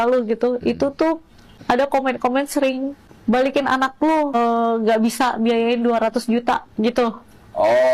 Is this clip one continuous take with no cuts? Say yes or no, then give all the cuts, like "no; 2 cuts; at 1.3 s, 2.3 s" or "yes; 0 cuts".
no; 3 cuts; at 1.5 s, 3.0 s, 4.3 s